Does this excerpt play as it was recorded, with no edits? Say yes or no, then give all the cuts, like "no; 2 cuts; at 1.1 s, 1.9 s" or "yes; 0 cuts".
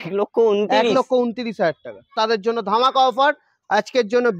no; 1 cut; at 2.2 s